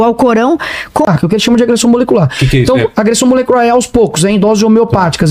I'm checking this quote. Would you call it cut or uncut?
cut